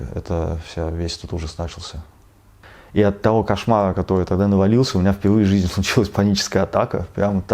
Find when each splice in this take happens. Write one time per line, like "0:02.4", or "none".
0:02.5